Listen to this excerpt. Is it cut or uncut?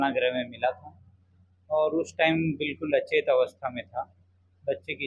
uncut